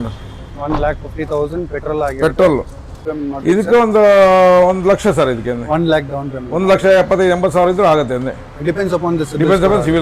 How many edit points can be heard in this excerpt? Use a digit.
1